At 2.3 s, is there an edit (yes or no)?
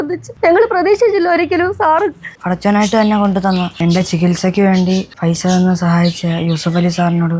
yes